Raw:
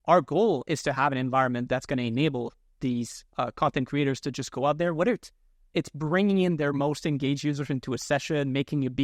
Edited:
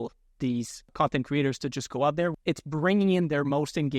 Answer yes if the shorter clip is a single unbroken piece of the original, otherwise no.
no